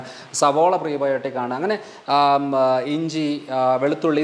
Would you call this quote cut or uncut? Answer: uncut